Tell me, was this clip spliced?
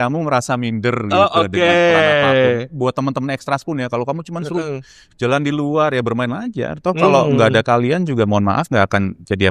no; 0 cuts

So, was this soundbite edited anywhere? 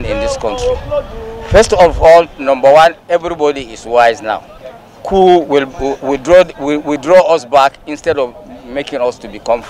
no; 0 cuts

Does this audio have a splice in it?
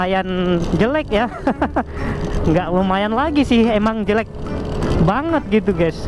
no; 0 cuts

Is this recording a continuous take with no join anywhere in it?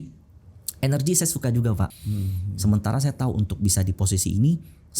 no; 1 cut; at 1.9 s

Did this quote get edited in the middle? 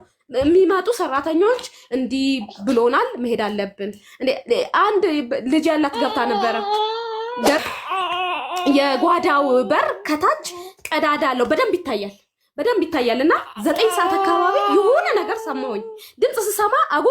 yes; 1 cut; at 7.6 s

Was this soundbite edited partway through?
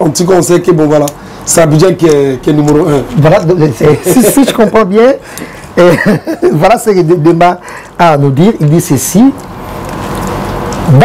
no; 0 cuts

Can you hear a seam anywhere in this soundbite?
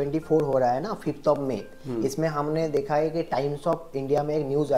no; 0 cuts

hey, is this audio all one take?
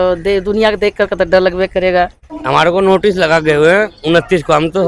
no; 1 cut; at 2.3 s

